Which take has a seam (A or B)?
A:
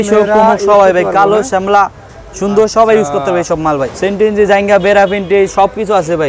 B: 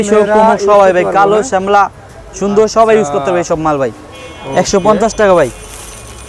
A